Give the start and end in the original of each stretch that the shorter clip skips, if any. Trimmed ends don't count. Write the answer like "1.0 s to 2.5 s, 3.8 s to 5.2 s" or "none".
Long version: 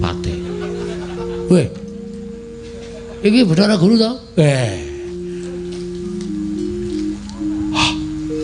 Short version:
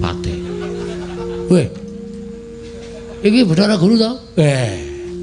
none